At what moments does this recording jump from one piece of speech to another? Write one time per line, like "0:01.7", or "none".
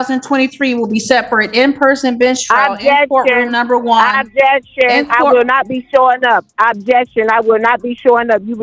none